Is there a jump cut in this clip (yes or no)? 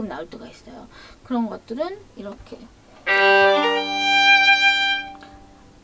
no